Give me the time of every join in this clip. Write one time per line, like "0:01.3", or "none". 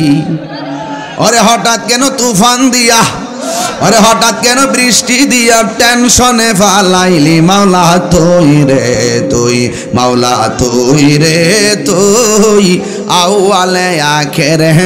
none